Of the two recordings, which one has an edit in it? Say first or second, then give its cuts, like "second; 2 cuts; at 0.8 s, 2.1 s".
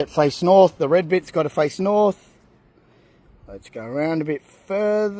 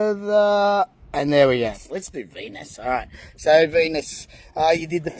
second; 1 cut; at 1.8 s